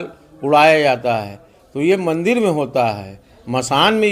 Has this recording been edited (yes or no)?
no